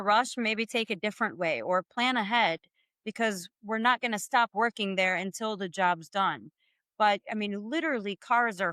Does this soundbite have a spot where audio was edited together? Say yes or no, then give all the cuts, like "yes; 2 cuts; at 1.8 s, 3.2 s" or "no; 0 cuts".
no; 0 cuts